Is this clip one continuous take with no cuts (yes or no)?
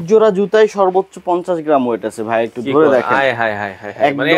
yes